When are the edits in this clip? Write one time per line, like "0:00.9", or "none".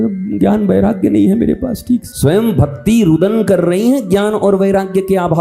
0:02.1